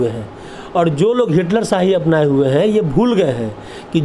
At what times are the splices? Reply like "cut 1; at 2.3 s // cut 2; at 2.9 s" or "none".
none